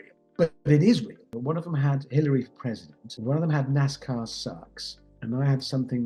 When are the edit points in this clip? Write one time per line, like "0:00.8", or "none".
0:01.3
0:03.1
0:05.1